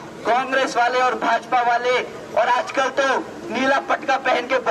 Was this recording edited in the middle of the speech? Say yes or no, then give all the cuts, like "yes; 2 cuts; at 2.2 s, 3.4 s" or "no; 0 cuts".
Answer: no; 0 cuts